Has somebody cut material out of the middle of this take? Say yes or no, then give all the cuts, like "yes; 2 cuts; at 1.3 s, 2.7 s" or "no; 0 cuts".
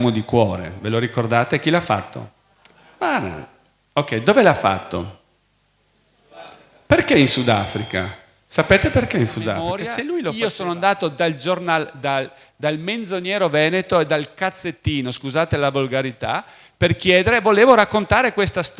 yes; 1 cut; at 10.1 s